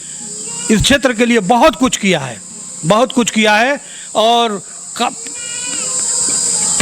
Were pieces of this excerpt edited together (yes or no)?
no